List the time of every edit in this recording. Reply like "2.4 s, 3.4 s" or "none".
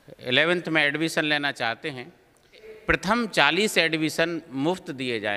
2.7 s